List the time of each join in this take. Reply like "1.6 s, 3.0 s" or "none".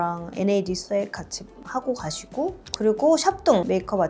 2.6 s